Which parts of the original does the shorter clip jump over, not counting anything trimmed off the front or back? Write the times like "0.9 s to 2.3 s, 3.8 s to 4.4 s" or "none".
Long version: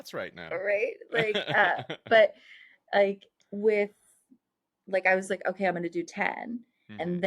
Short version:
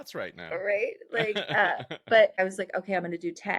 2.3 s to 5.1 s